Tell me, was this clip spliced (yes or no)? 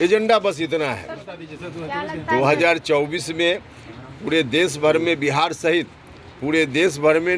yes